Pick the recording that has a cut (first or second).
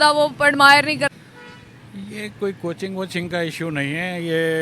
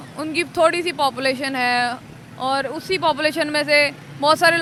first